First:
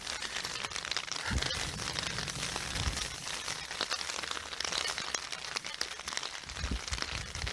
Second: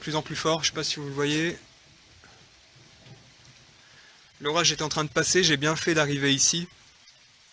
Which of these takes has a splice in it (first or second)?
second